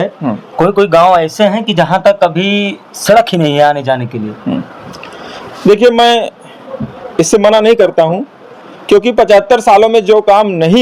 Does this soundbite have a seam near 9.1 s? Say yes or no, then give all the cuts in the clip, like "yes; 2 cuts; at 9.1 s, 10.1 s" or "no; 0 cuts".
no; 0 cuts